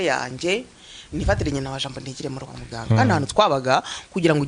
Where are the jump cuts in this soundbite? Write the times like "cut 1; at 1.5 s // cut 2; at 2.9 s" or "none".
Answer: cut 1; at 2.8 s